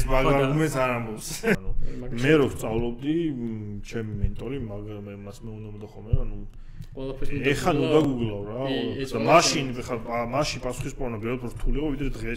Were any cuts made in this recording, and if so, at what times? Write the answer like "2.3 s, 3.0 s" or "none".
1.6 s